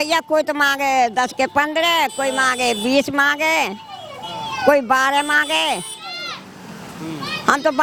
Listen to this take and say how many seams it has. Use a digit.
0